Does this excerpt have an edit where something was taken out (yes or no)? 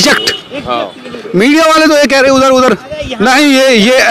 no